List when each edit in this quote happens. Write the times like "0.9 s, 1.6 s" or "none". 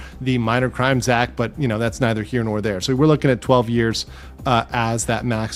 none